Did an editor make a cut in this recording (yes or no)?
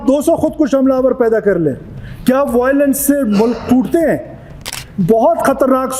yes